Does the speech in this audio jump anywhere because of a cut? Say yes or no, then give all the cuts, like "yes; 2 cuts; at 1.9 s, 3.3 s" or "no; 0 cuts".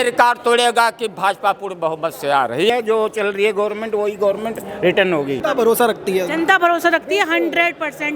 yes; 2 cuts; at 2.7 s, 5.4 s